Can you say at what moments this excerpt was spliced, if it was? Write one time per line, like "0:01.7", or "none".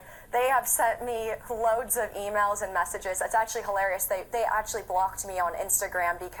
0:02.2